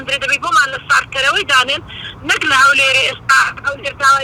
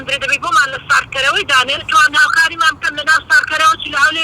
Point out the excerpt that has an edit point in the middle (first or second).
second